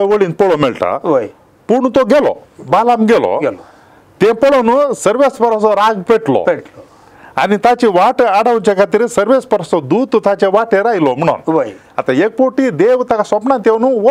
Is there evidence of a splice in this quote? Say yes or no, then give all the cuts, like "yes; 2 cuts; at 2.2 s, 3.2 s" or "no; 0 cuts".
no; 0 cuts